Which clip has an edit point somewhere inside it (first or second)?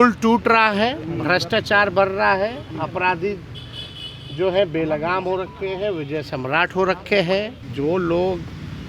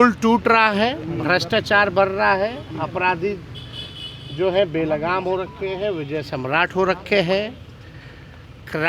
first